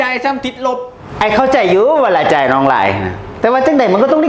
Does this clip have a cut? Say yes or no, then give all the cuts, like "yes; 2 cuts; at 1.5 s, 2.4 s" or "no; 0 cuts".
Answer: no; 0 cuts